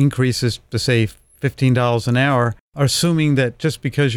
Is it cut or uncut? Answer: cut